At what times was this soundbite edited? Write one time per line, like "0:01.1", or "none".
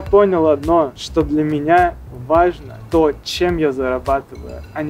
0:01.0
0:02.7